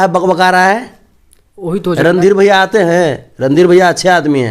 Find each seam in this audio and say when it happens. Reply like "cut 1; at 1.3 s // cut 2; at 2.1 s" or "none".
none